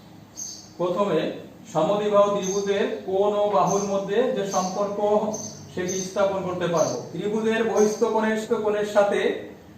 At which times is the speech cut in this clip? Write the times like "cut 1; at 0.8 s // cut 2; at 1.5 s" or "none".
cut 1; at 7.1 s // cut 2; at 8.4 s